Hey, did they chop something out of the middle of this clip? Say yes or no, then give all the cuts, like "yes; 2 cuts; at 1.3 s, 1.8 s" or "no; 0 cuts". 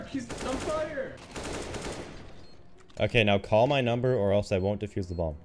yes; 1 cut; at 1.2 s